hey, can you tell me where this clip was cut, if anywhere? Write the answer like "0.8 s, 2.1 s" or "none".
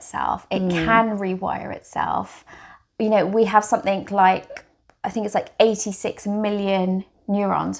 none